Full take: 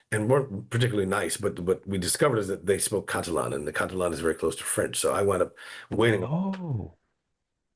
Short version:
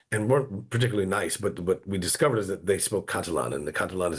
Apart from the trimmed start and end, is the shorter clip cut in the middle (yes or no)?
no